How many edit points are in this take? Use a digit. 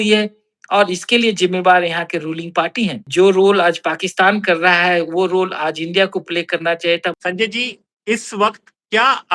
2